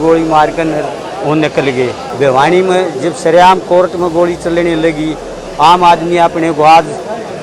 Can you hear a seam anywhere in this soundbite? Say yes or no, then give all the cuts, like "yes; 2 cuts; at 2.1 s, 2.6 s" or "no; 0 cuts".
yes; 1 cut; at 2.0 s